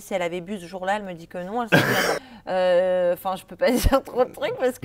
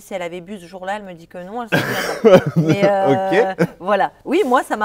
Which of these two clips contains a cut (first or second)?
first